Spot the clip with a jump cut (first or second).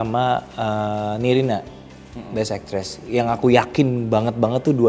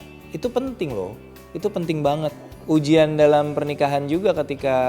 second